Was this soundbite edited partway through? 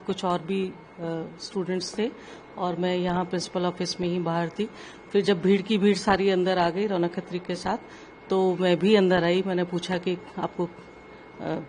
no; 0 cuts

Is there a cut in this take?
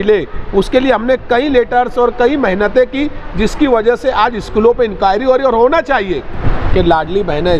yes; 1 cut; at 6.4 s

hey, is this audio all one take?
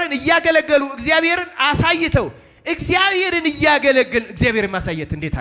yes; 0 cuts

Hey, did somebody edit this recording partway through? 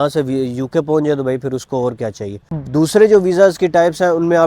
yes; 1 cut; at 2.5 s

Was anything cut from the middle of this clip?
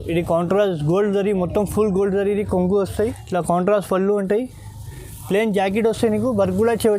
yes; 1 cut; at 2.9 s

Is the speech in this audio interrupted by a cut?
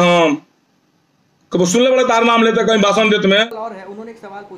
yes; 1 cut; at 3.4 s

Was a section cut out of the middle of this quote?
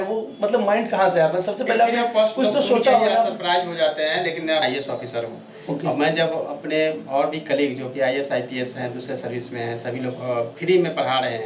yes; 1 cut; at 4.6 s

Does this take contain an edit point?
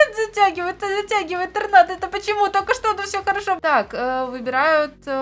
yes; 1 cut; at 3.6 s

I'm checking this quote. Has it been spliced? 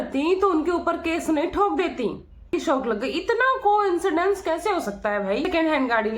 yes; 2 cuts; at 2.5 s, 5.4 s

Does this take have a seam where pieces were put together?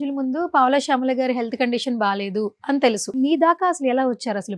yes; 1 cut; at 3.1 s

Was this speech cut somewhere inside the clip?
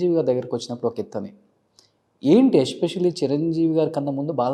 no; 0 cuts

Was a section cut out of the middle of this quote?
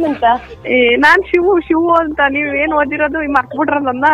no; 0 cuts

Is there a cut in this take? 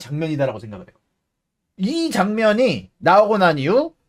no; 0 cuts

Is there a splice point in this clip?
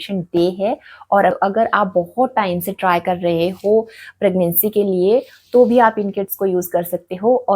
yes; 1 cut; at 1.4 s

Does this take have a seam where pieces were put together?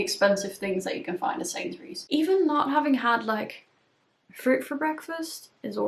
yes; 1 cut; at 1.9 s

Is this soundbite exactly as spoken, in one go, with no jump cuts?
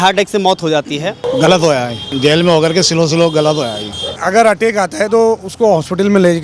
no; 3 cuts; at 1.3 s, 2.1 s, 4.2 s

